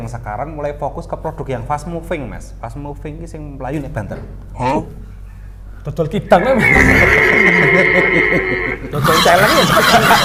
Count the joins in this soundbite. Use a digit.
0